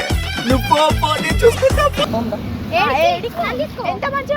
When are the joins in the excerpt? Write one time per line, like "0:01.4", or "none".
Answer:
0:02.1